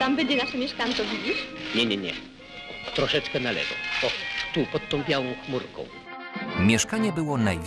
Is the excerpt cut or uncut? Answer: uncut